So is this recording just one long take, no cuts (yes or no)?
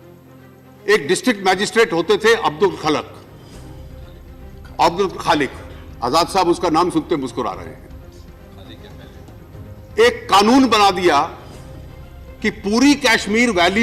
no